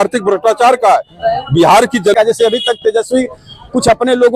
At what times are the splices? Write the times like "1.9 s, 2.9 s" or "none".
2.1 s